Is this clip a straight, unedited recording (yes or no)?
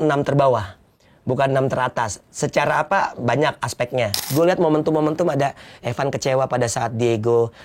no